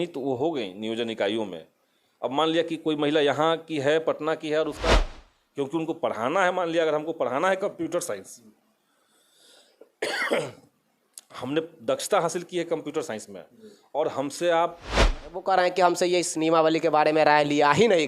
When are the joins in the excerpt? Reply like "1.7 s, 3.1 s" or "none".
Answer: 4.9 s, 15.1 s